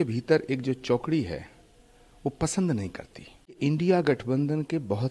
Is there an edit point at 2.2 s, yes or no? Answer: no